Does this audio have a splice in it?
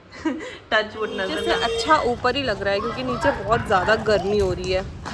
yes; 1 cut; at 1.3 s

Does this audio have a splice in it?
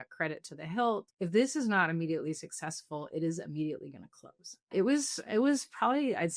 yes; 2 cuts; at 1.1 s, 4.7 s

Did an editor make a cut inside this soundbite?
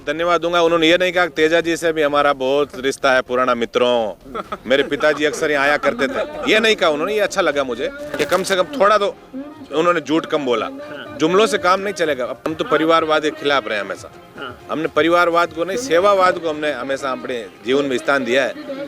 yes; 1 cut; at 12.5 s

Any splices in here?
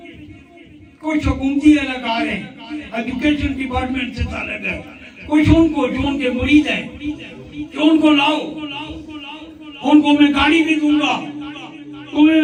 no; 0 cuts

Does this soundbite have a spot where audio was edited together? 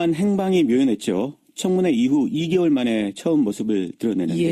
no; 0 cuts

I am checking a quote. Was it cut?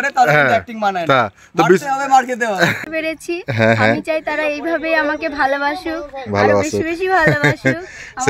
yes; 1 cut; at 2.8 s

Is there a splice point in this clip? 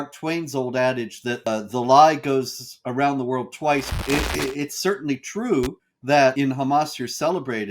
yes; 3 cuts; at 1.5 s, 3.9 s, 5.9 s

